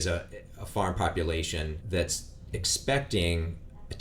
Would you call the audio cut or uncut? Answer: uncut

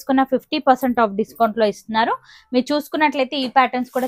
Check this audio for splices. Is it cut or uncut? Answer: uncut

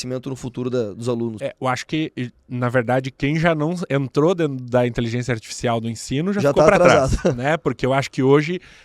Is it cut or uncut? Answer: cut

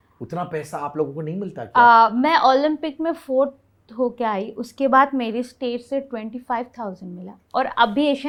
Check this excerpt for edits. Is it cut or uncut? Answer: uncut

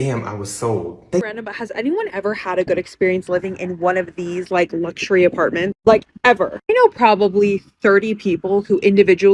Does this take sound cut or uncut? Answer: cut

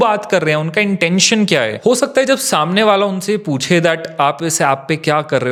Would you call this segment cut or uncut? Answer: uncut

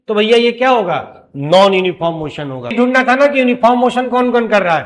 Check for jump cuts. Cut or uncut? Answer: cut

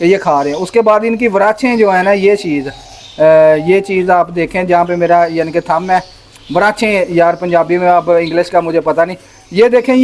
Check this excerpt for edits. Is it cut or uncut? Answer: uncut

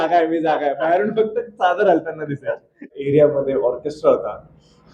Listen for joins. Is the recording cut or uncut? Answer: cut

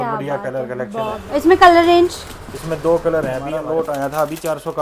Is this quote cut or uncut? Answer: cut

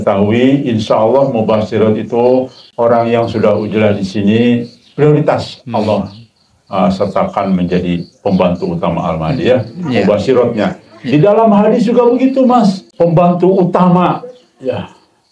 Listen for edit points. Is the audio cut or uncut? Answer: cut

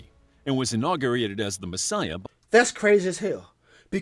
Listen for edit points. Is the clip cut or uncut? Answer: cut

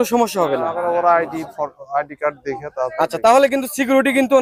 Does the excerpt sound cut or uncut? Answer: uncut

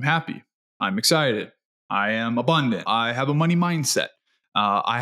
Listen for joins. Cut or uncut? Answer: cut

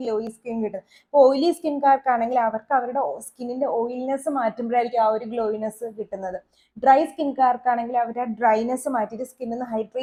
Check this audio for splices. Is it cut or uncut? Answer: uncut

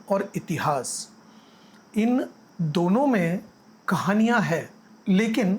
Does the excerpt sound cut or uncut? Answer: uncut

